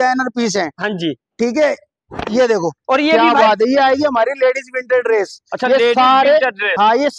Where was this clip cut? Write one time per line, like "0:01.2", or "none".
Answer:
0:03.5

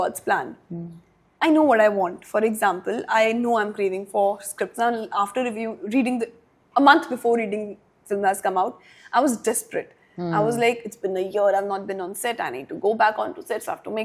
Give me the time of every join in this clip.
none

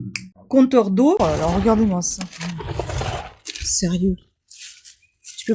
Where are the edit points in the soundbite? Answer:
0:01.2

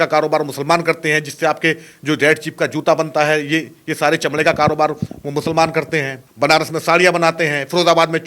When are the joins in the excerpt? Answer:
0:06.2

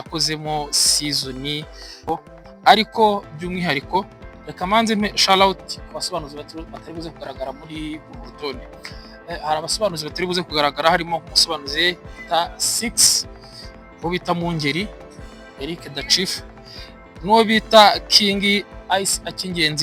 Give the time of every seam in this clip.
0:02.1

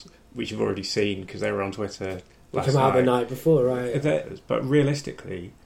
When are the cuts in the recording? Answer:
0:04.3

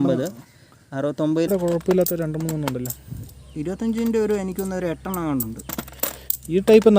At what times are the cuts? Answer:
0:01.5

